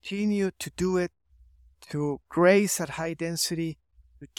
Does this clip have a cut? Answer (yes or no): no